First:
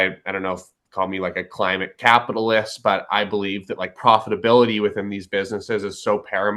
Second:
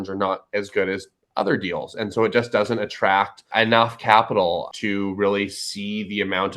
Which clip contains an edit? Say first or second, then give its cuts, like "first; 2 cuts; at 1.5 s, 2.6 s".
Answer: second; 2 cuts; at 3.5 s, 4.7 s